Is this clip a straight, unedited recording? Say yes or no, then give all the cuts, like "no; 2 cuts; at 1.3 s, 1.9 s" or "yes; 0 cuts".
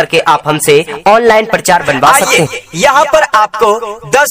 no; 1 cut; at 1.0 s